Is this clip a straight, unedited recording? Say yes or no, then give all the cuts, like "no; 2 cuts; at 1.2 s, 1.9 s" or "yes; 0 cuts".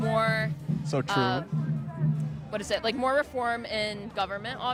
yes; 0 cuts